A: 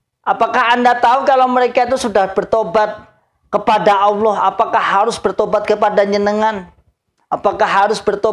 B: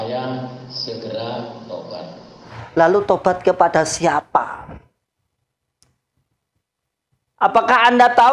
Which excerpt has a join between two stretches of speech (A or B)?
B